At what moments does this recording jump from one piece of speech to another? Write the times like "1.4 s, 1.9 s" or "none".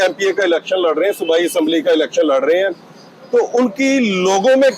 none